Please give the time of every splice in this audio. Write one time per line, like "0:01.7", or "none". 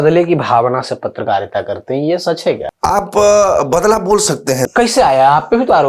0:02.7
0:04.6